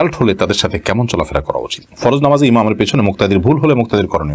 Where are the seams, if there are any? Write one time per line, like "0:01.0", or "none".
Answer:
0:01.8